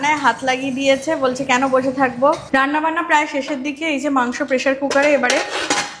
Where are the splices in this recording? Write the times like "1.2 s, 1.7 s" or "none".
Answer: 2.4 s